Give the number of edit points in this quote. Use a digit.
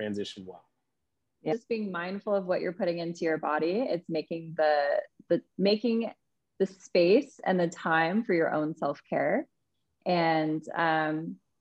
1